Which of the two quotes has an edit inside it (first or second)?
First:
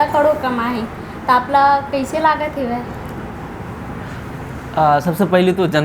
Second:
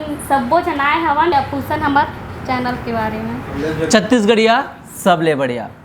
second